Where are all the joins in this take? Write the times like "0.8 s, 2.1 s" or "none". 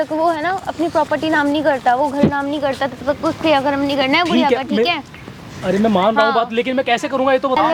none